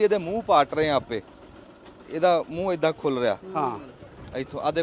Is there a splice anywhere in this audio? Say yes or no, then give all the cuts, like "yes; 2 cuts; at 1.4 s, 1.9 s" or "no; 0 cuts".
no; 0 cuts